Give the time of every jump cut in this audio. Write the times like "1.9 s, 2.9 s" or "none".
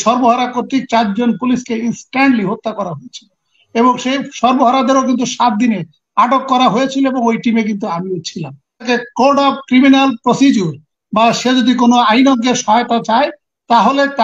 8.9 s